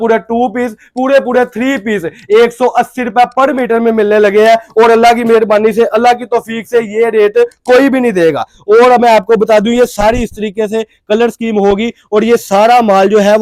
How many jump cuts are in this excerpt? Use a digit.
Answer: 0